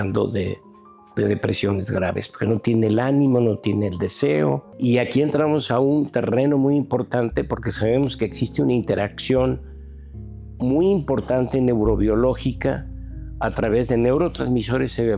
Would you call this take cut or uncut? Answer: cut